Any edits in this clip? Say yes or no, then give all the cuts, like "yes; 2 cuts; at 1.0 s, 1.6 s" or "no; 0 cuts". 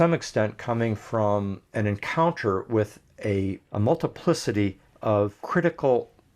yes; 3 cuts; at 1.6 s, 3.6 s, 5.4 s